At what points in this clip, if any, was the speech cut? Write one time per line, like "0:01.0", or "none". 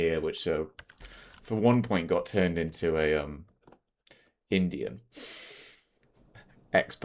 none

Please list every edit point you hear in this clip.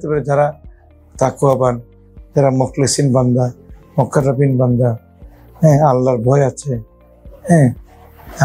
none

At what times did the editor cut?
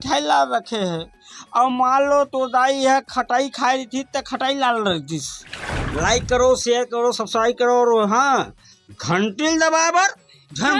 0:05.6

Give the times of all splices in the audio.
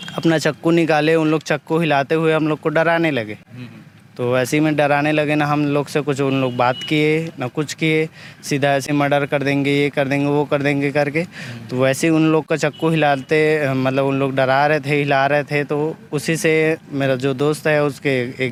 none

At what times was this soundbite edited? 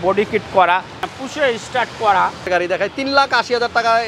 0:01.0
0:02.4

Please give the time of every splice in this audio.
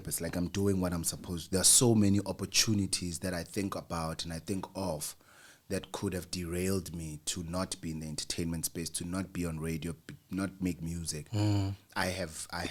none

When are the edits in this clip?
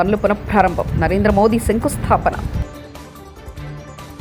none

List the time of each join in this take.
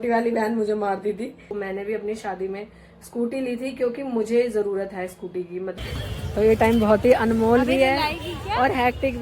0:01.5
0:05.7

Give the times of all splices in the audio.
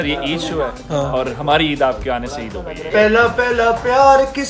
0:02.8

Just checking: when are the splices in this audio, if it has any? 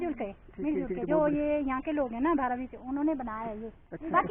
none

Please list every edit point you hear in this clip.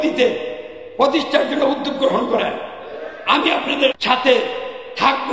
0:04.0

